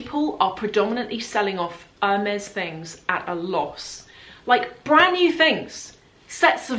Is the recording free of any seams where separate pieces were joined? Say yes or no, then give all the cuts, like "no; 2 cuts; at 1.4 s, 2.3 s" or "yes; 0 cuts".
yes; 0 cuts